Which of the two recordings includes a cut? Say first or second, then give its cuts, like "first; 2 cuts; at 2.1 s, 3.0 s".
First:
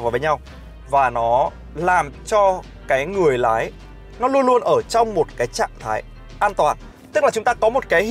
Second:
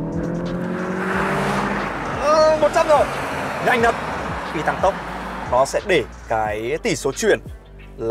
second; 1 cut; at 4.1 s